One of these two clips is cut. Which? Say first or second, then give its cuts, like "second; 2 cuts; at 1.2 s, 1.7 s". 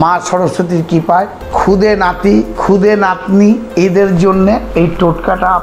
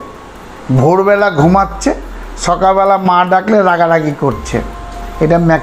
first; 4 cuts; at 1.4 s, 2.5 s, 3.7 s, 4.7 s